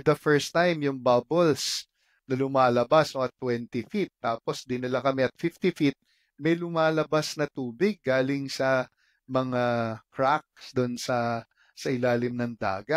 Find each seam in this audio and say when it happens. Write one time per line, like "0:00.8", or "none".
none